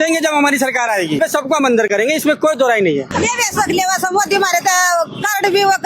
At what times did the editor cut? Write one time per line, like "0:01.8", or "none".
0:01.2
0:03.1